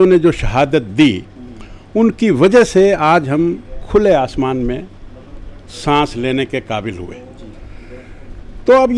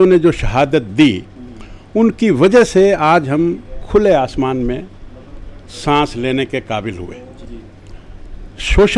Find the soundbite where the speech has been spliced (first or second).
second